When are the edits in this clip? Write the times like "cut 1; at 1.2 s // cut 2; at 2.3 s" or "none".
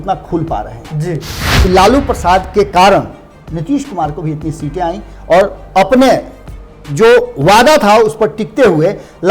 cut 1; at 1.5 s